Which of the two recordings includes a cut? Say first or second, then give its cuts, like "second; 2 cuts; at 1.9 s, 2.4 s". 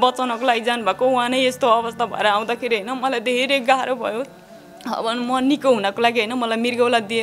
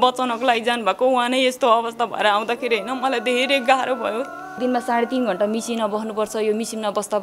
second; 1 cut; at 4.6 s